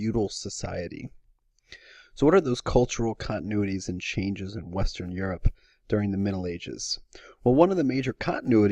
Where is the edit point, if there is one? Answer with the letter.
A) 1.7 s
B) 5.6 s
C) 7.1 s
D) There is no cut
B